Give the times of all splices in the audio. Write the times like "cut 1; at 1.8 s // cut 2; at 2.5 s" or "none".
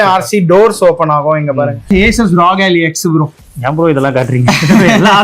cut 1; at 1.9 s